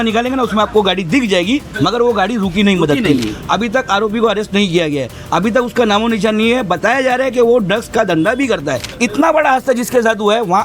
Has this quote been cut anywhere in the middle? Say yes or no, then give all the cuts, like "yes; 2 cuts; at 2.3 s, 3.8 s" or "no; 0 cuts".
yes; 2 cuts; at 3.3 s, 8.9 s